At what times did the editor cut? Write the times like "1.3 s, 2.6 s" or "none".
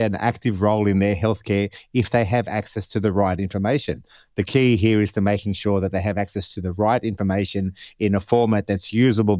none